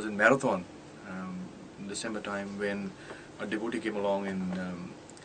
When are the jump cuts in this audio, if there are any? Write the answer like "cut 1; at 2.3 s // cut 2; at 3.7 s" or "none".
cut 1; at 3.8 s

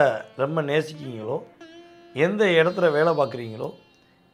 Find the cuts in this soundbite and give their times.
none

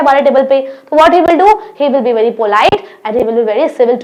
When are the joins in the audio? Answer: none

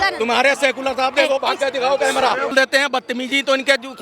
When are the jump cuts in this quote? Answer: cut 1; at 2.5 s

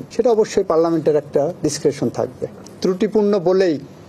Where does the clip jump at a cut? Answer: cut 1; at 2.6 s

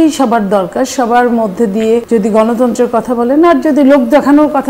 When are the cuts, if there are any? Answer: cut 1; at 2.0 s

